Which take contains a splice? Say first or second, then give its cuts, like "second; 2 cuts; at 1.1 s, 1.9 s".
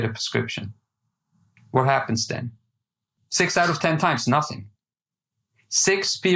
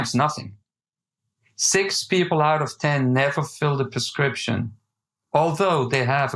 first; 1 cut; at 3.0 s